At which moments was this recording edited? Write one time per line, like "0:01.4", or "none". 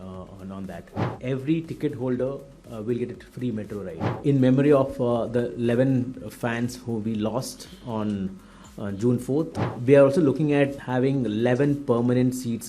0:01.1
0:03.9
0:09.5
0:10.8